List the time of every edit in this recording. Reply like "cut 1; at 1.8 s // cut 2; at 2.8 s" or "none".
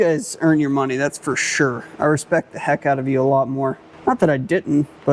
cut 1; at 3.9 s